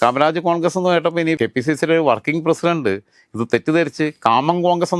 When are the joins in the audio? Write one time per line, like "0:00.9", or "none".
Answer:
0:01.4